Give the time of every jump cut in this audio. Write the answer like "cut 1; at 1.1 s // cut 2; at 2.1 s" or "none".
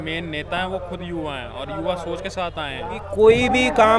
cut 1; at 3.0 s